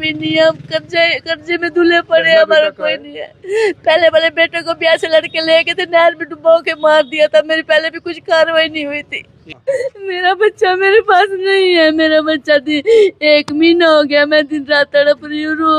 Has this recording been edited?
yes; 1 cut; at 9.5 s

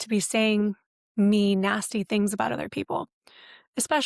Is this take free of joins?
yes; 0 cuts

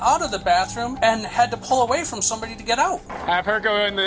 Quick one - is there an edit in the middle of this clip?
yes; 1 cut; at 3.1 s

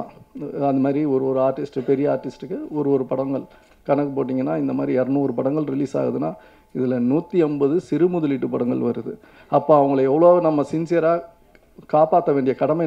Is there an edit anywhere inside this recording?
no; 0 cuts

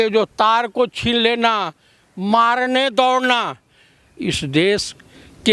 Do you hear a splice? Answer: no; 0 cuts

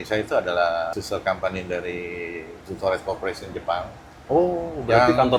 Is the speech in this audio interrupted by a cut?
yes; 1 cut; at 0.9 s

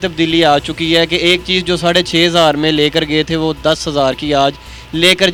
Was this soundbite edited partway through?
no; 0 cuts

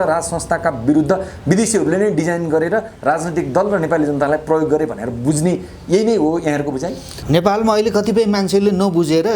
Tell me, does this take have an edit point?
yes; 1 cut; at 7.1 s

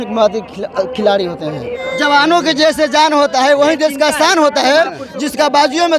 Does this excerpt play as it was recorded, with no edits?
no; 1 cut; at 1.7 s

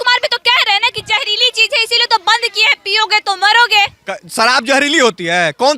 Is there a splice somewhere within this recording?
no; 0 cuts

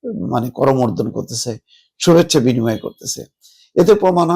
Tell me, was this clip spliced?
no; 0 cuts

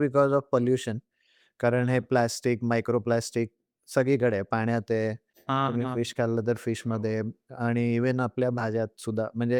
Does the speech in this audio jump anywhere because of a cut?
no; 0 cuts

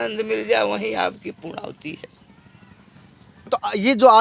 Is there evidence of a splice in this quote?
yes; 1 cut; at 3.3 s

